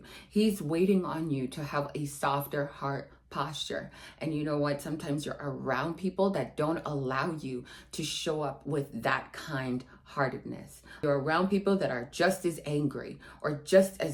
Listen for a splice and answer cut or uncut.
uncut